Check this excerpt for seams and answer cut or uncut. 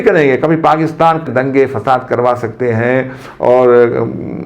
cut